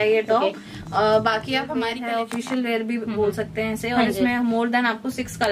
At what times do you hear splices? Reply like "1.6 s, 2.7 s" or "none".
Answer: 2.0 s